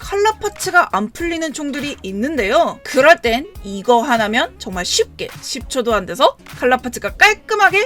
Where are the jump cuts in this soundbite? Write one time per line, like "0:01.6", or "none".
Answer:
none